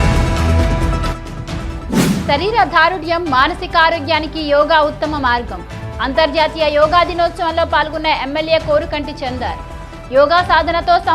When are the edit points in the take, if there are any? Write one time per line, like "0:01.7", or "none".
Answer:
0:01.5